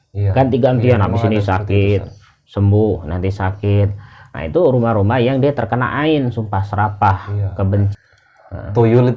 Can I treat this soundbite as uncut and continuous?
no; 1 cut; at 7.9 s

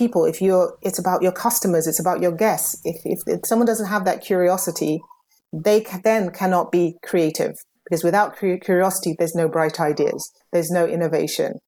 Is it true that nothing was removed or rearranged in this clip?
yes; 0 cuts

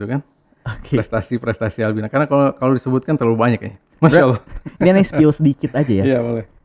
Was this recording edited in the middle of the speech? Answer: no; 0 cuts

